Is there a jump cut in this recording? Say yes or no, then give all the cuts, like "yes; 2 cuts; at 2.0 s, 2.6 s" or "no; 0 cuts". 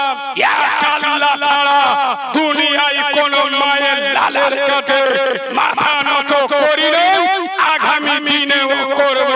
no; 0 cuts